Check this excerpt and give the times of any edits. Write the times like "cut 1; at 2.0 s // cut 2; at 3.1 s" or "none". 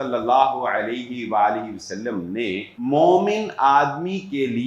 cut 1; at 2.7 s